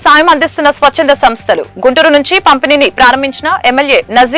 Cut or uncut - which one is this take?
uncut